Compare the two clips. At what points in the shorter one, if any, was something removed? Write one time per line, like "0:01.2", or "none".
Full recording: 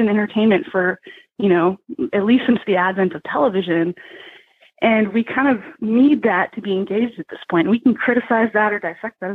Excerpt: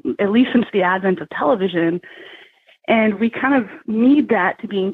none

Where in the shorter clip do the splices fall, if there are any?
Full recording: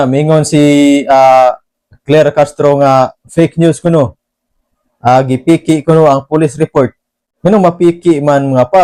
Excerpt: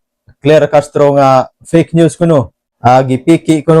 0:02.6

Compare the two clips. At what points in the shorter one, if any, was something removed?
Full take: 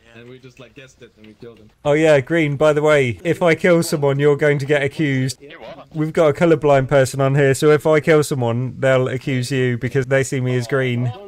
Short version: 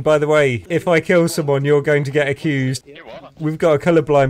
none

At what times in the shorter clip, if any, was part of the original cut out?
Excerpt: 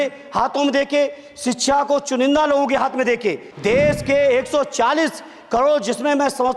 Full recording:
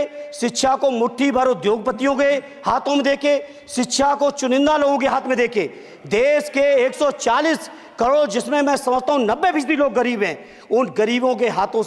0:03.5

